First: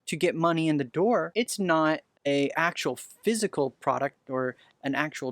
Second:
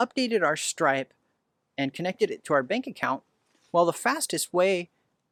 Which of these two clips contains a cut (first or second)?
first